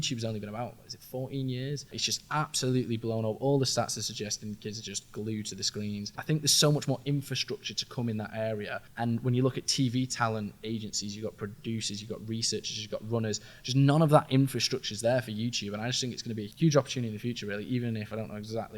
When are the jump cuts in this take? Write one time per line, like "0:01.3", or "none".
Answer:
0:02.0
0:06.2
0:08.8
0:16.5